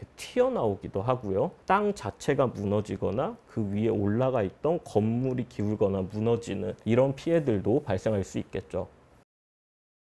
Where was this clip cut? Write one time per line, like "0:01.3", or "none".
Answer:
none